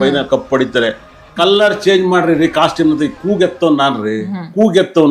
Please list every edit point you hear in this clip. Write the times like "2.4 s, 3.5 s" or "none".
none